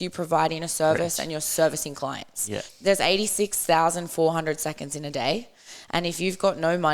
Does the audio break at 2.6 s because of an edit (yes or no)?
yes